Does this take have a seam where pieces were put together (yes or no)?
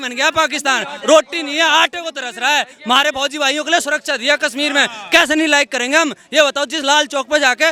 no